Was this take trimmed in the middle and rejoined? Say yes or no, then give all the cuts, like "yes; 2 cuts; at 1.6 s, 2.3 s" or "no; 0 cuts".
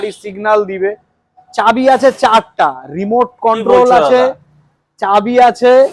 no; 0 cuts